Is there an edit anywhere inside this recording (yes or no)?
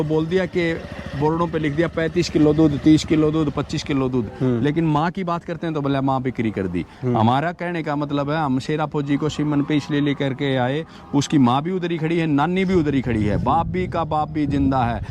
no